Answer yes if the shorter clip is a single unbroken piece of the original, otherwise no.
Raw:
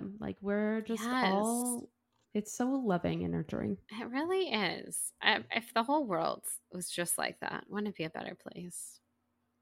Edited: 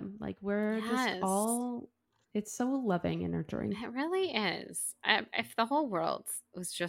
no